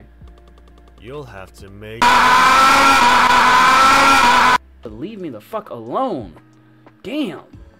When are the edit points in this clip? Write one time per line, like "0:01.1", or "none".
0:04.8